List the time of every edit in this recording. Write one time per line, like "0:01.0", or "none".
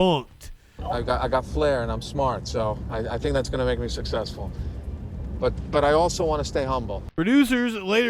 0:00.8
0:07.0